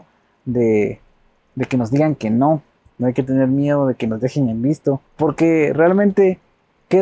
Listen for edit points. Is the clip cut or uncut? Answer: cut